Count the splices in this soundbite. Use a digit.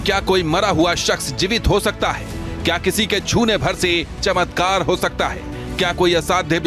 0